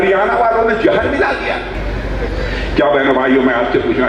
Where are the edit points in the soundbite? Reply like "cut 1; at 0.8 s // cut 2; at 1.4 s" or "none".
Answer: none